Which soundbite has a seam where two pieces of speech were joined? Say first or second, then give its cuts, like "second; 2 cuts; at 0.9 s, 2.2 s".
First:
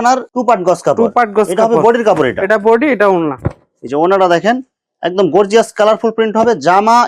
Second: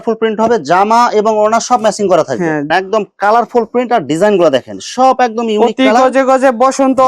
second; 1 cut; at 2.6 s